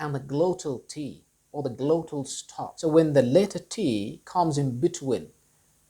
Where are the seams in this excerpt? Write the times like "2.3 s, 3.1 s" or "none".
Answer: 2.7 s